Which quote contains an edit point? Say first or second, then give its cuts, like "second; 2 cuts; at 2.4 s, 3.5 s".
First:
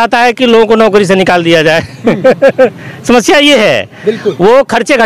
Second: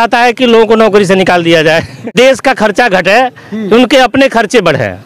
second; 1 cut; at 2.1 s